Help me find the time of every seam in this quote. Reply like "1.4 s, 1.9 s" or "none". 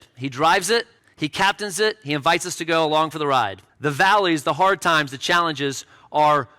1.0 s, 3.6 s